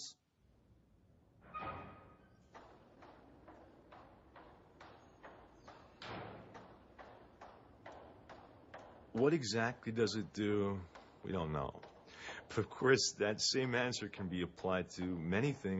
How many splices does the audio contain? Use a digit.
1